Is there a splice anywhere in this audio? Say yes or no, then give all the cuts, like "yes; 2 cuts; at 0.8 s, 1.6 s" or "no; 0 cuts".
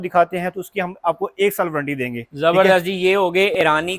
no; 0 cuts